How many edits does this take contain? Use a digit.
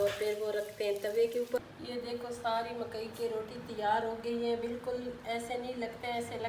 1